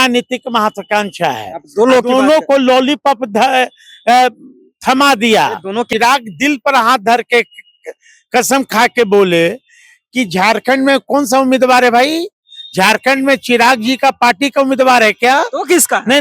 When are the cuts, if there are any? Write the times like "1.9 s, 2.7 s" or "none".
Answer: 5.9 s